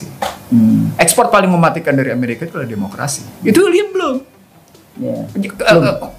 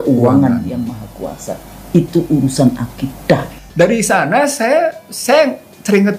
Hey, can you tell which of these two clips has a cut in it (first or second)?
second